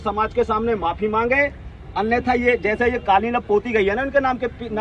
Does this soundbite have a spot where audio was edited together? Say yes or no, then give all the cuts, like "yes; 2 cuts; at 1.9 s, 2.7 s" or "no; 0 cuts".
no; 0 cuts